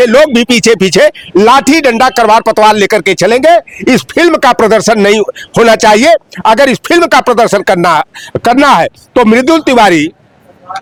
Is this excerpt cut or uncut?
uncut